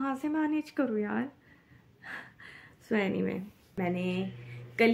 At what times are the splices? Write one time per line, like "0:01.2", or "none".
0:03.8

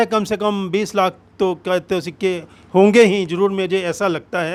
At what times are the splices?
none

